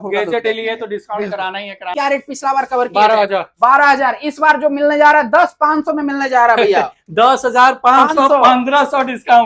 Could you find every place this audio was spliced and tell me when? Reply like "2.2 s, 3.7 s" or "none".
1.9 s